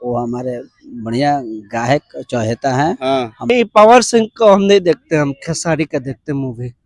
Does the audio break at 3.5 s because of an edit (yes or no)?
yes